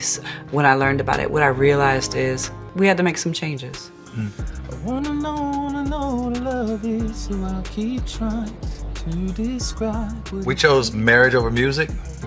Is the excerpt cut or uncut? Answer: uncut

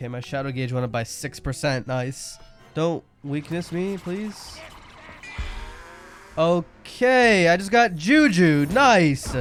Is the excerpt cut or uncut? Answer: uncut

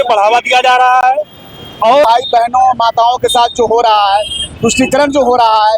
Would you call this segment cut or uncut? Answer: cut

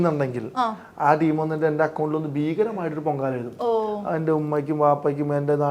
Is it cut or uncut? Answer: uncut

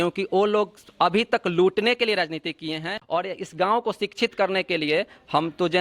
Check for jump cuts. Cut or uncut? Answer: cut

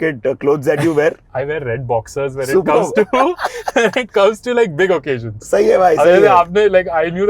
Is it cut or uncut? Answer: cut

